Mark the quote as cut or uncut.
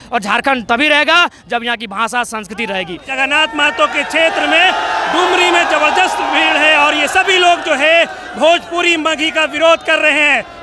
cut